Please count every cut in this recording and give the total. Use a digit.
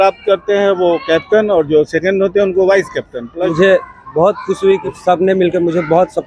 2